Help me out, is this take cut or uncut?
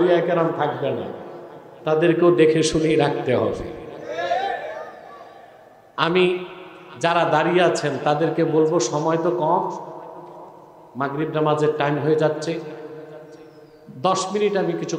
uncut